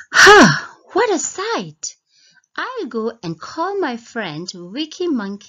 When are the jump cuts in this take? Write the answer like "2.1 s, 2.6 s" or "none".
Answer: 4.1 s